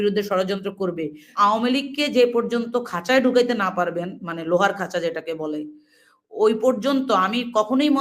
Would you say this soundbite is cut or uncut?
cut